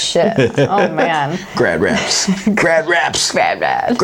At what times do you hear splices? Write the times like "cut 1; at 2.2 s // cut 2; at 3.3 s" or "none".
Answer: none